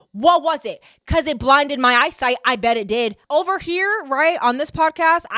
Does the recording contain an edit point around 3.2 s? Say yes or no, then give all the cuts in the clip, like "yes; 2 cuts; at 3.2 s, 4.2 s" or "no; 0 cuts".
yes; 1 cut; at 3.2 s